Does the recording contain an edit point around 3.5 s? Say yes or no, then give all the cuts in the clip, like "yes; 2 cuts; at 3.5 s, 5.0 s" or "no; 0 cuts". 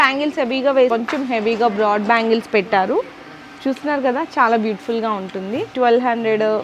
no; 2 cuts; at 0.9 s, 5.7 s